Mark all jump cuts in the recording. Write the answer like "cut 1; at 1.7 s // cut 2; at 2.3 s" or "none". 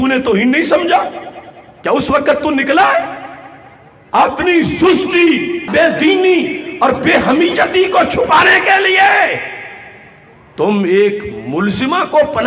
none